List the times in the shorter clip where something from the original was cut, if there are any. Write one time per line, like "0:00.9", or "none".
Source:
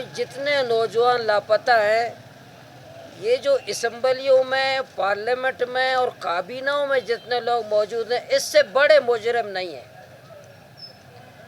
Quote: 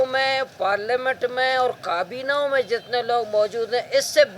none